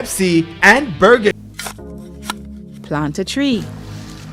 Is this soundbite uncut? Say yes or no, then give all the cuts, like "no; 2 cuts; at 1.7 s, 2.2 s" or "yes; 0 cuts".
no; 1 cut; at 1.3 s